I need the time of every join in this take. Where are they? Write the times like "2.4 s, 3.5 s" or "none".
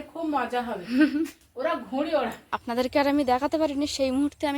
2.5 s